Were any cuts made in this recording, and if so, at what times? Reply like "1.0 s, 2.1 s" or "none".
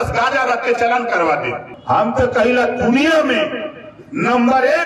1.7 s